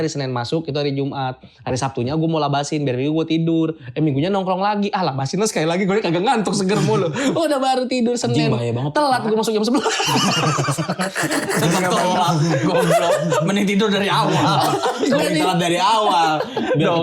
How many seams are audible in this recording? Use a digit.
0